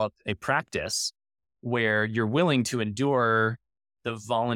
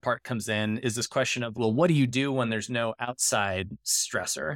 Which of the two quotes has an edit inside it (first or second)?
second